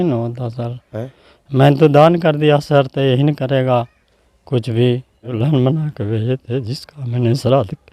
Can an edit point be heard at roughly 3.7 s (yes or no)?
no